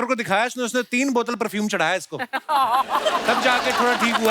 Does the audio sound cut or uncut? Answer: uncut